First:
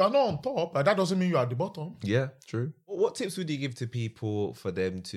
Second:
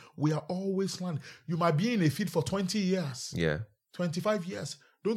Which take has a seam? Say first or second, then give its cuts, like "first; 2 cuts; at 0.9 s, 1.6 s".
first; 1 cut; at 3.0 s